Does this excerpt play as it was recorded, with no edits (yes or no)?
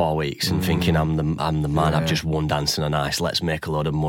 yes